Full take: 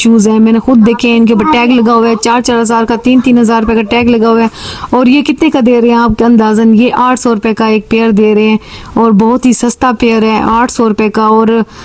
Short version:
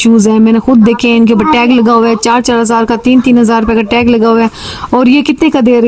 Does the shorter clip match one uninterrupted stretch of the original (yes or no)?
yes